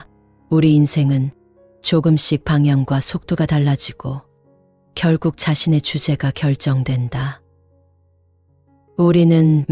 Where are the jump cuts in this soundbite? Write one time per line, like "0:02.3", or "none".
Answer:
none